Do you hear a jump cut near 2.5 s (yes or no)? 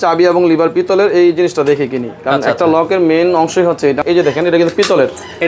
no